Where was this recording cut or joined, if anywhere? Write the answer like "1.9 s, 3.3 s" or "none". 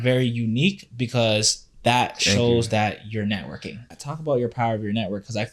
4.0 s